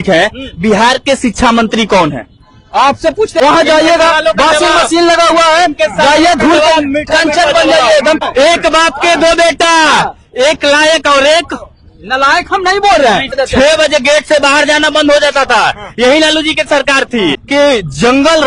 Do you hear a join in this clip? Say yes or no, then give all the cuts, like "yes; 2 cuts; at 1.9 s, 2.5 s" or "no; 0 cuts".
yes; 4 cuts; at 3.4 s, 8.2 s, 13.3 s, 17.4 s